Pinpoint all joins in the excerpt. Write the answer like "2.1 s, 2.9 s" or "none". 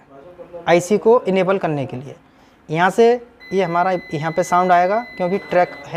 none